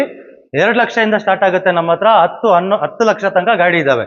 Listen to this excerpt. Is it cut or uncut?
uncut